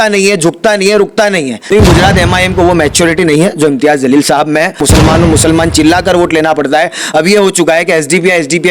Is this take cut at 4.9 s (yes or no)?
yes